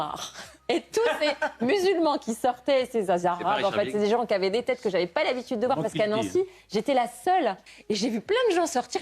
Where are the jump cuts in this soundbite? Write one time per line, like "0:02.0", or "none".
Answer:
0:07.7